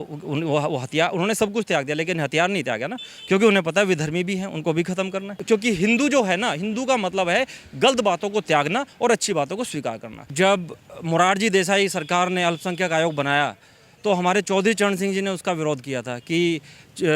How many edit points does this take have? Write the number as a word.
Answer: two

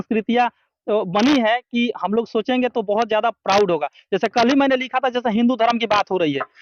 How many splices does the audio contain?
zero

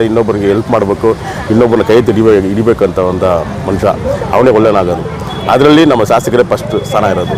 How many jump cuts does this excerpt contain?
zero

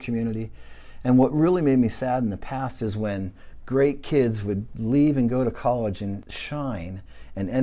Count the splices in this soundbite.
one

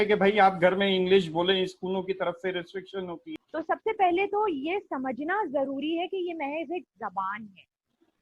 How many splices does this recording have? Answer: one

